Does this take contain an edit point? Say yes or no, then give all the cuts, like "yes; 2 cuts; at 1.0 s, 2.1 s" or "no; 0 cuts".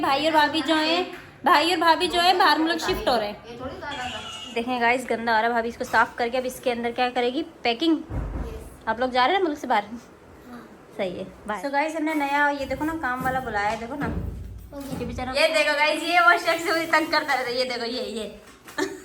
yes; 3 cuts; at 4.5 s, 11.6 s, 15.3 s